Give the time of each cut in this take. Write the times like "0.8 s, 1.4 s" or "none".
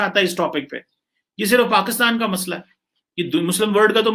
none